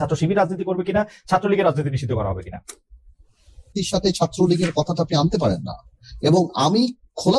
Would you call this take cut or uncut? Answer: cut